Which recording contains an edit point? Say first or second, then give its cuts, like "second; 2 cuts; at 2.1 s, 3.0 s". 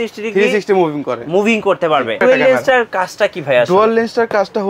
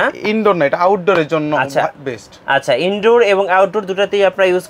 first; 1 cut; at 2.2 s